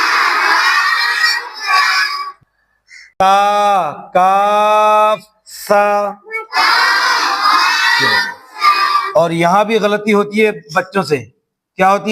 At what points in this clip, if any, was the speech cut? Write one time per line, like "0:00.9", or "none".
0:02.2
0:09.1